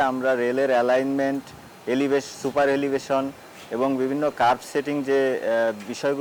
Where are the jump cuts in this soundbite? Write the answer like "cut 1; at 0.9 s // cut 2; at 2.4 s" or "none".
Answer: none